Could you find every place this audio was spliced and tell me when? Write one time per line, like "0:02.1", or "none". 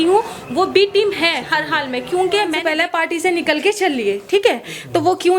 0:02.6